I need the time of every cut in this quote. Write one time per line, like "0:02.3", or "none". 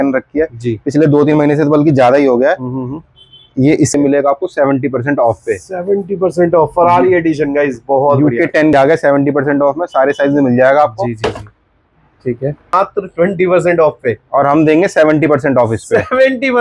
0:03.9
0:08.7
0:12.7